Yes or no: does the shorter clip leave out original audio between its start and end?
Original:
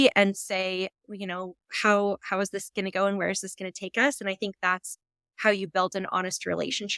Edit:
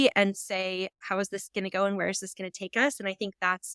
yes